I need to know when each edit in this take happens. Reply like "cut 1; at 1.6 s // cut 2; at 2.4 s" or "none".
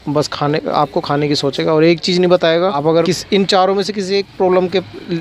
cut 1; at 3.1 s